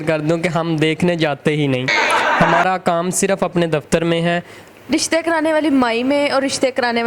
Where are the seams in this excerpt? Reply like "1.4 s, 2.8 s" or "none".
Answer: 4.6 s